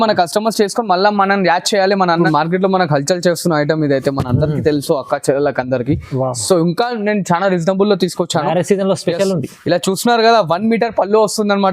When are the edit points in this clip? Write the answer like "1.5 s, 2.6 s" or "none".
2.2 s